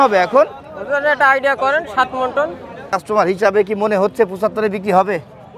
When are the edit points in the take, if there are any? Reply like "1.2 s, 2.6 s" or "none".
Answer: 2.9 s